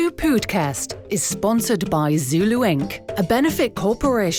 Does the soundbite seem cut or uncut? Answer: uncut